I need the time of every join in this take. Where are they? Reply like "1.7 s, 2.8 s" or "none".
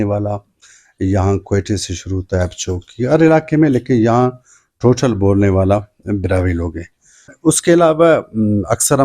7.3 s